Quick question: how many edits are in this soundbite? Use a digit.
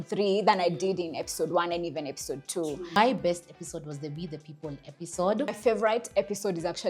2